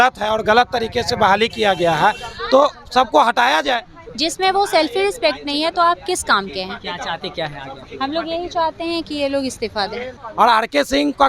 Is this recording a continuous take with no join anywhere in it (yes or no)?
no